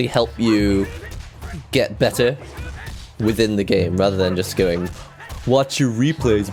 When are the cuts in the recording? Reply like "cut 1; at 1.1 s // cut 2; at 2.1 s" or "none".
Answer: none